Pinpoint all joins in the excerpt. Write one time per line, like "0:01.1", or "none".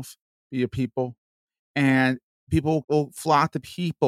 0:02.8